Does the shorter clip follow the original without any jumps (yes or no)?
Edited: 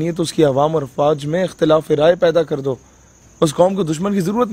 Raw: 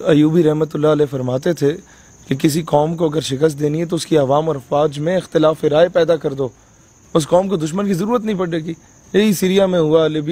yes